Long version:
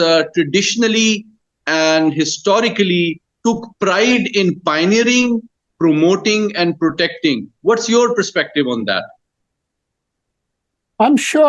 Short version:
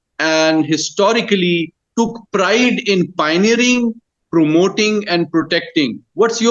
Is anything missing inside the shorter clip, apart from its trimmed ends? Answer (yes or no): no